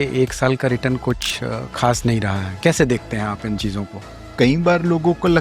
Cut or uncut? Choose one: cut